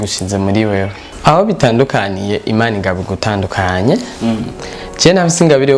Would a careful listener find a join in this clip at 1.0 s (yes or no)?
yes